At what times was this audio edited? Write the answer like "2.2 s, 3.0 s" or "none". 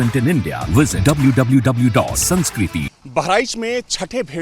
3.0 s

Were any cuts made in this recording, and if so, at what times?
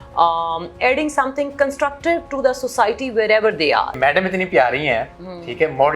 3.9 s

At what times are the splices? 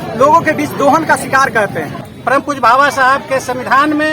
2.5 s

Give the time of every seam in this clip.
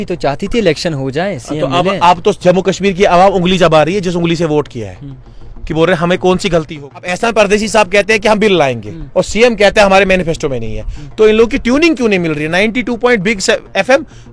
7.1 s

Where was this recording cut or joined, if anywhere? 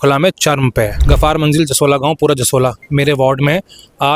1.0 s

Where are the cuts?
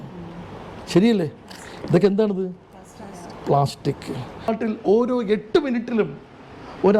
4.5 s

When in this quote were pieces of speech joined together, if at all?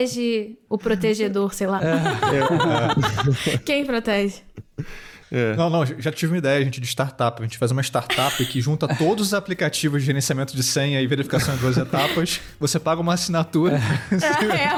none

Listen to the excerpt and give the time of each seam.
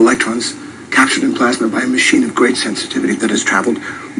1.8 s

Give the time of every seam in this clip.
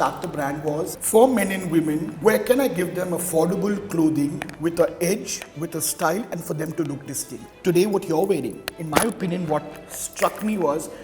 1.0 s, 2.1 s, 7.4 s

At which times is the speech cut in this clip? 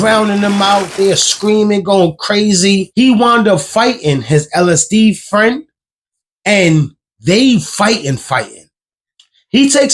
2.9 s

